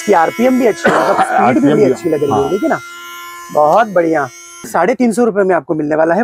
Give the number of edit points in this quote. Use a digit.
1